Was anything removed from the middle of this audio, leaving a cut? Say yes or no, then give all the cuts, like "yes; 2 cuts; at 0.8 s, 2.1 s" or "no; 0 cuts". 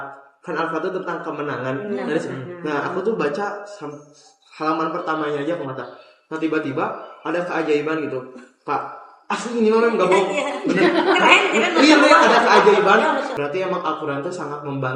yes; 1 cut; at 13.3 s